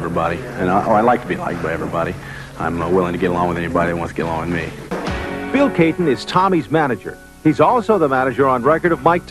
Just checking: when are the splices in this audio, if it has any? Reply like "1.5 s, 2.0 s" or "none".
3.2 s